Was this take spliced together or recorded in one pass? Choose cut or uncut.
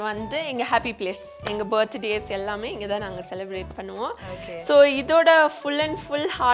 uncut